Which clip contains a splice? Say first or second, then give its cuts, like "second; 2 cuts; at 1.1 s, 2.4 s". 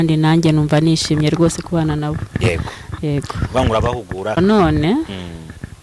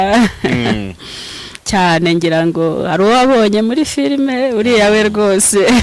first; 1 cut; at 4.4 s